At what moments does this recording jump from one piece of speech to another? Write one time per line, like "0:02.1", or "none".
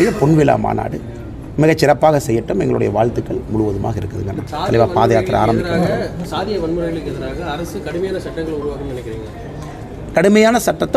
0:04.4